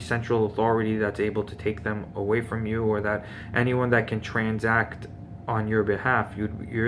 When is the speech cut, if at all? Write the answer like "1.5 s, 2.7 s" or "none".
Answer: 5.7 s